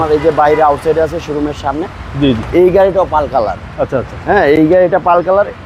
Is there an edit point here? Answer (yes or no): no